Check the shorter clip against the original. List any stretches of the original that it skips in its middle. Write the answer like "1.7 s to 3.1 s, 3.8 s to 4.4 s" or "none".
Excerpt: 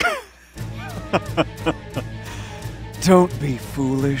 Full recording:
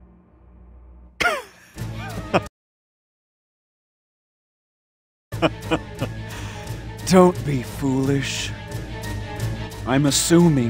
2.5 s to 5.3 s